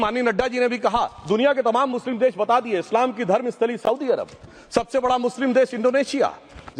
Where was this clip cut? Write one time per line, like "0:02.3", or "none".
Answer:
none